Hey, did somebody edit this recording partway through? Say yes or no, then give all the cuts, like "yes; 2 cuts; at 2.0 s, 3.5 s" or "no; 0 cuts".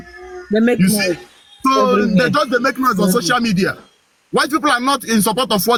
no; 0 cuts